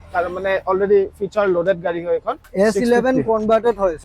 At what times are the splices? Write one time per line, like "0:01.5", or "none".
0:02.4